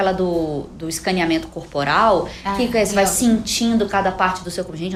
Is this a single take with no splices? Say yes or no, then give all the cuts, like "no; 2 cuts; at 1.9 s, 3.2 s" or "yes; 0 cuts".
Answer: yes; 0 cuts